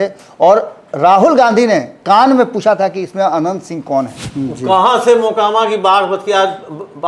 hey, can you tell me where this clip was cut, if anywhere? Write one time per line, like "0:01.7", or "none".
0:04.2

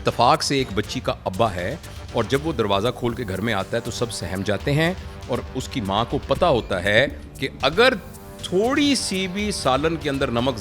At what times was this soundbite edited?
none

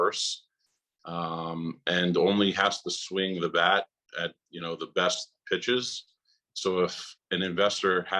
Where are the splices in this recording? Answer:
none

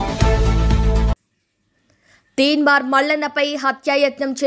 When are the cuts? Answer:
0:01.2

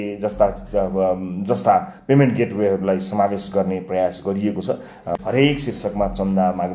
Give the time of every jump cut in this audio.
0:05.1

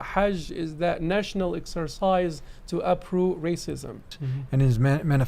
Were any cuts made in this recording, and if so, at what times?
0:04.1

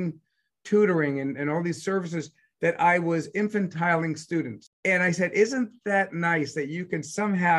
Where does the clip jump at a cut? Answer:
0:04.6

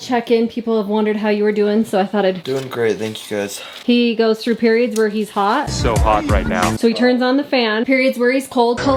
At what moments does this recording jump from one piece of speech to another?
none

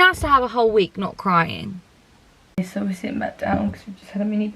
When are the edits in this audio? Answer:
0:02.5

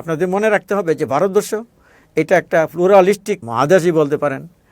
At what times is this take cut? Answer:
0:03.5

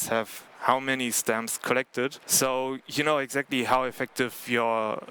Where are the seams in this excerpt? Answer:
0:02.2

